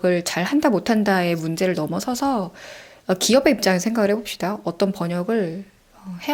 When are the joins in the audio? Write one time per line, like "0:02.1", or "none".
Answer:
none